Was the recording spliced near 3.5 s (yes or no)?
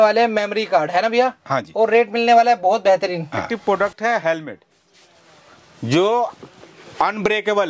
yes